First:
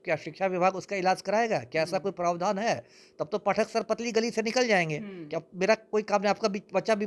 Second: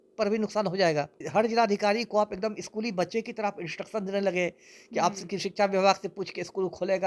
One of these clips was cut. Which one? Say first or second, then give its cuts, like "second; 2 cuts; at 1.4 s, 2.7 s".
second; 1 cut; at 1.2 s